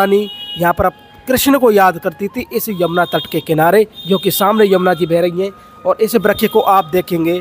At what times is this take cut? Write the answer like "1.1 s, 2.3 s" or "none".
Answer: none